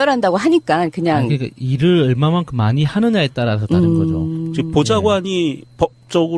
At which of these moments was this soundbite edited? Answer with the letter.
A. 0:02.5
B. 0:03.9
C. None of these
C